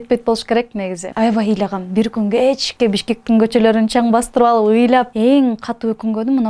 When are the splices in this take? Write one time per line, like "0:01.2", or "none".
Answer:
0:01.1
0:05.1